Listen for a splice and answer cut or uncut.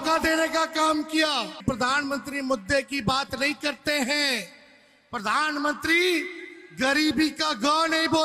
cut